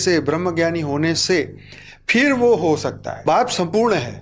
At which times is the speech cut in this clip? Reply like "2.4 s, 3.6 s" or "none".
3.2 s